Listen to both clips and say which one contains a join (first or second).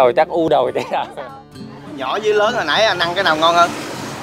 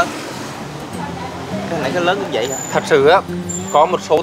first